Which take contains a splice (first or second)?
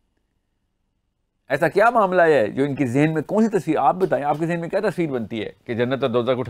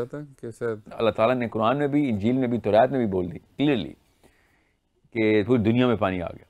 second